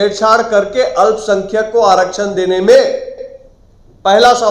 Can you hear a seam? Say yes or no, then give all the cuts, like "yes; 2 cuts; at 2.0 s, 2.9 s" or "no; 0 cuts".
no; 0 cuts